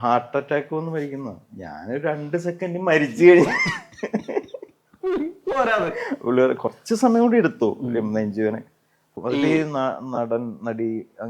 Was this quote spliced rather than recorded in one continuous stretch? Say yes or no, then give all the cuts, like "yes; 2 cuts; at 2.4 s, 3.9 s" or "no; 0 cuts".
yes; 1 cut; at 9.2 s